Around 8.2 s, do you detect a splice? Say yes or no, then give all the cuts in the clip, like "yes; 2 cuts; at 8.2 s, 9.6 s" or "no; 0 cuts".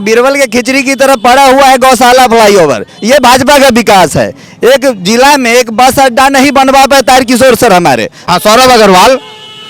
yes; 1 cut; at 8.2 s